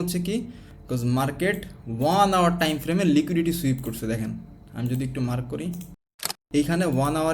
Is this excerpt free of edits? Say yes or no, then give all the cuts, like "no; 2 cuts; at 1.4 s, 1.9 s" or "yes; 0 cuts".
no; 1 cut; at 6.4 s